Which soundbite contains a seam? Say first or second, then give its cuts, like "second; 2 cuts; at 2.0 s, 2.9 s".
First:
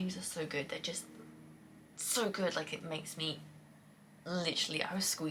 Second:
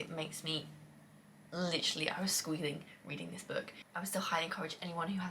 second; 1 cut; at 3.8 s